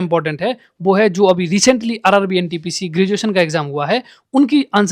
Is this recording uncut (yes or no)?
yes